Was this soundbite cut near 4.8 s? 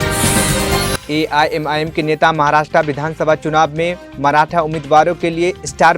no; 1 cut; at 1.0 s

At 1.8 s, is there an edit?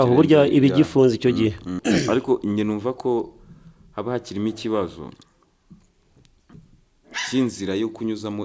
yes; 1 cut; at 1.8 s

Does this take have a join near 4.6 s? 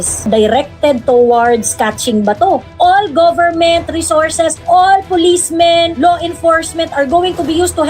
no; 1 cut; at 2.7 s

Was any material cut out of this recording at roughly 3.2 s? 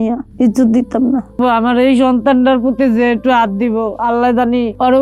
no; 1 cut; at 1.4 s

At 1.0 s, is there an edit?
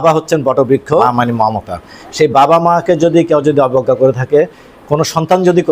yes; 1 cut; at 1.0 s

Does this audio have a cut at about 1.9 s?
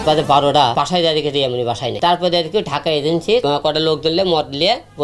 yes; 3 cuts; at 0.7 s, 1.9 s, 3.4 s

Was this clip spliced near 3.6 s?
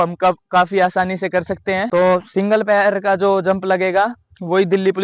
no; 1 cut; at 1.9 s

